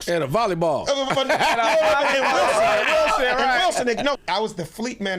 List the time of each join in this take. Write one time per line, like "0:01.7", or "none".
0:04.2